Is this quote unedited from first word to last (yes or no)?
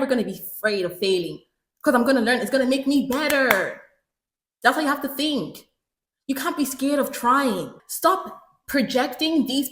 no